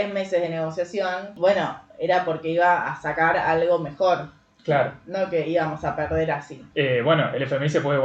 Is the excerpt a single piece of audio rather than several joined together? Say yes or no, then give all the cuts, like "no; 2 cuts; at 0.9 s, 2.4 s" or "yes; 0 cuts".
no; 2 cuts; at 1.3 s, 6.5 s